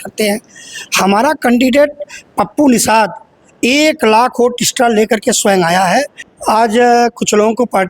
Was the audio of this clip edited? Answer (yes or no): yes